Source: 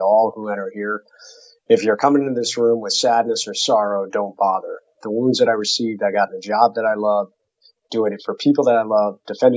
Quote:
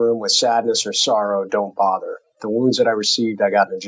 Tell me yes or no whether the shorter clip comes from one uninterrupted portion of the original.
yes